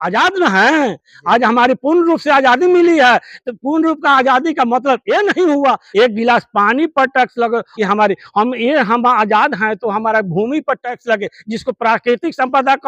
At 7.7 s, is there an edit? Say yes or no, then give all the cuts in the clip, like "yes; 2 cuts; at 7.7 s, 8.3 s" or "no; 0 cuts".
yes; 2 cuts; at 5.8 s, 7.7 s